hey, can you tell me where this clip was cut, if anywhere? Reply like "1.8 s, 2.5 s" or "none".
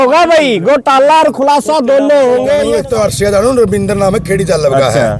2.6 s

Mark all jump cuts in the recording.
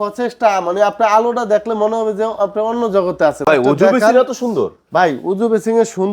3.4 s

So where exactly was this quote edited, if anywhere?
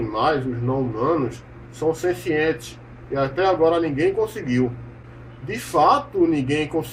none

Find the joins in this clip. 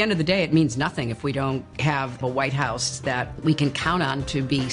2.2 s

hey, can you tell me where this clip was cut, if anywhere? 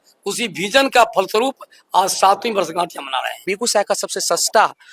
3.5 s

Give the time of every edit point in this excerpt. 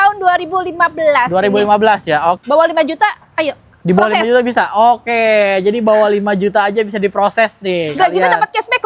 2.4 s

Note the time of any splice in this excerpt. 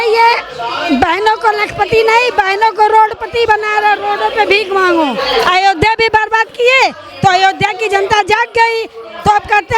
5.2 s

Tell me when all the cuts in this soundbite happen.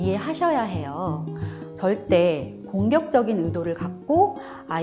none

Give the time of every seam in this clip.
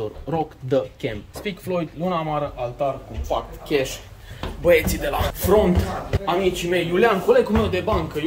1.3 s, 5.3 s, 6.1 s

